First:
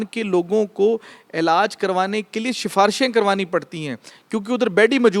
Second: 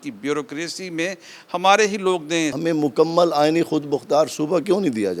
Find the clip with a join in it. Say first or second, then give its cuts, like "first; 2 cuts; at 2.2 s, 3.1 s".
second; 1 cut; at 2.5 s